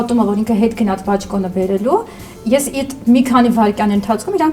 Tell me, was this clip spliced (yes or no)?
no